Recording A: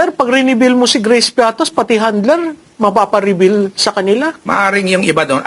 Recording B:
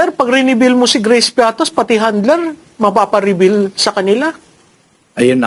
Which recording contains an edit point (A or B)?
A